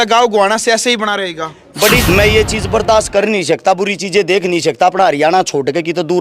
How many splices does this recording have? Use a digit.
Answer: 1